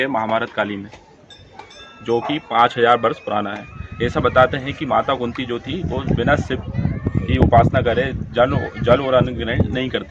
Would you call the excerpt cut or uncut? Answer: uncut